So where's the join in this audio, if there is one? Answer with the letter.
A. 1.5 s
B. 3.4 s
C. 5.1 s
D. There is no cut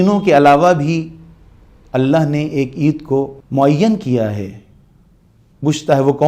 B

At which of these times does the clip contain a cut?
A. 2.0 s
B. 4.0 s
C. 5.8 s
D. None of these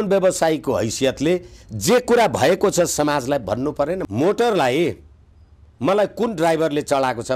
B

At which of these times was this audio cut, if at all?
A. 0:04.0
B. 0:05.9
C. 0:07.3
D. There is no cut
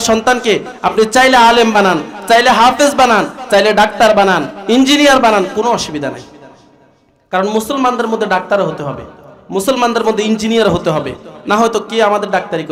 D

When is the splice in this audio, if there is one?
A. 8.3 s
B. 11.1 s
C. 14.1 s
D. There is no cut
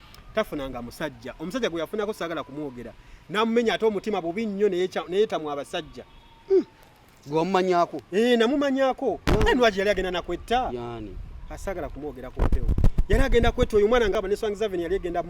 C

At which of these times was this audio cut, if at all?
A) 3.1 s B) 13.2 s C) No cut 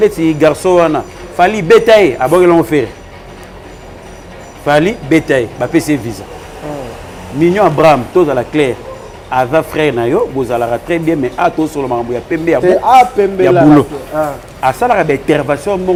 C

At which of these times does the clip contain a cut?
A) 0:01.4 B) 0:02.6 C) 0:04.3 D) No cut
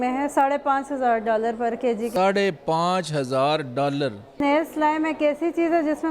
C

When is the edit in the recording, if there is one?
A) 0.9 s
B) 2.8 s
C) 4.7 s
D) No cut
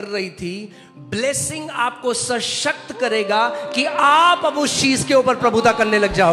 D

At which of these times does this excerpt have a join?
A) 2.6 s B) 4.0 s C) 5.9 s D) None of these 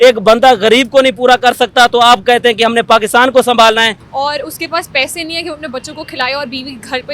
B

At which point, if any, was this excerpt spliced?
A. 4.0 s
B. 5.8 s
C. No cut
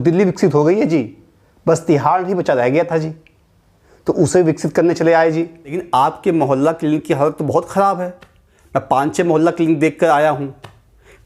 B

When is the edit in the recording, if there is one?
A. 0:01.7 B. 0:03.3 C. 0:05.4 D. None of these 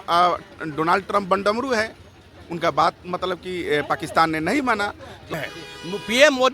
C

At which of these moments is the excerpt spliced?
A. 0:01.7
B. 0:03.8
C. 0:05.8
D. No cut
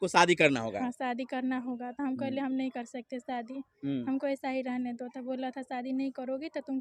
D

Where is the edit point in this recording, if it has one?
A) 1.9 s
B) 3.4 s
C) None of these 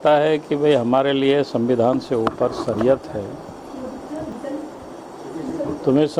C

